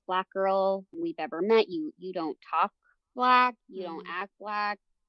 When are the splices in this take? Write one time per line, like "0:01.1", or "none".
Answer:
0:01.0